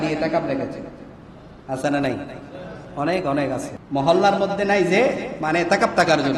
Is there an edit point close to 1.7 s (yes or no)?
no